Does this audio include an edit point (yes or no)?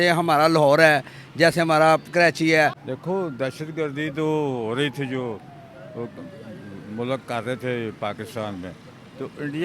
yes